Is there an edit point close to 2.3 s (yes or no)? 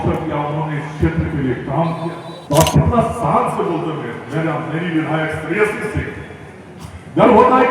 yes